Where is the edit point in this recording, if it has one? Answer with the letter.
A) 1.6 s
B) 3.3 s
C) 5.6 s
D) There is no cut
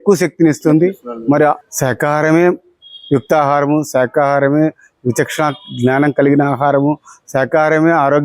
A